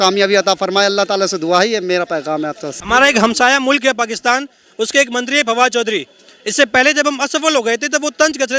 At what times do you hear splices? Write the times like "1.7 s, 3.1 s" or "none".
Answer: 2.7 s